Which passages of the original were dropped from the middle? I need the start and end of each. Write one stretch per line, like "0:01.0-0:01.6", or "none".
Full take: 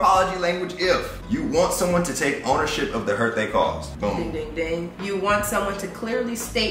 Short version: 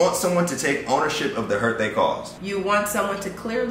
0:03.9-0:04.9